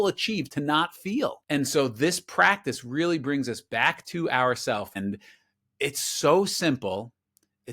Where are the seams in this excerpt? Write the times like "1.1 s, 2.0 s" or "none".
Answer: 1.4 s, 4.9 s

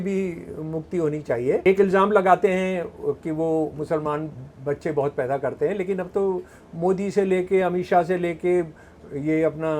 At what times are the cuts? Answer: 1.7 s

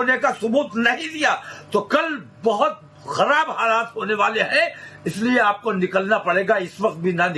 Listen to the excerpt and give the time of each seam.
5.5 s

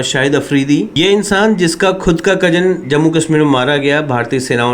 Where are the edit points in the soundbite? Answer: 0.9 s

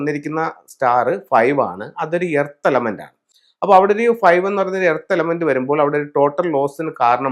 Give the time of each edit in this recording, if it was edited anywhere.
none

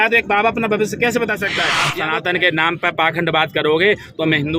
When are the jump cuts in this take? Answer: 1.8 s

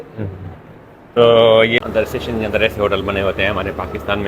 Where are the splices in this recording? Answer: 1.8 s

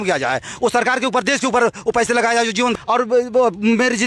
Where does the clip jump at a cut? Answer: 2.7 s

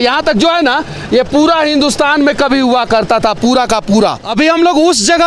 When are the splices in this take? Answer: 4.2 s

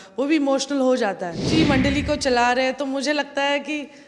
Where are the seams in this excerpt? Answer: 1.4 s

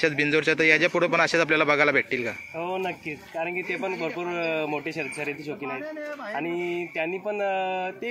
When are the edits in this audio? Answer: none

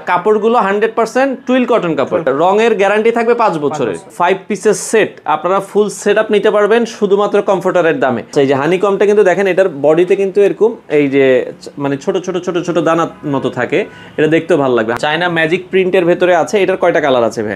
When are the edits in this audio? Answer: 2.3 s, 4.1 s, 8.3 s, 15.0 s

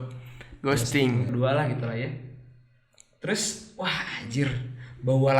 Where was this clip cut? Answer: 1.3 s

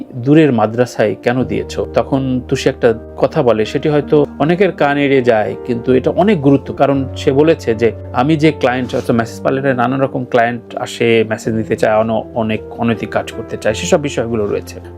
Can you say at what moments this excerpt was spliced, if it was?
6.7 s

